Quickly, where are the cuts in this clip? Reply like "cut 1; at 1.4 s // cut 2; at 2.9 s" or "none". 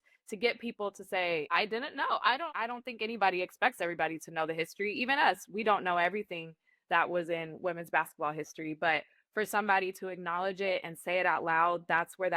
cut 1; at 1.5 s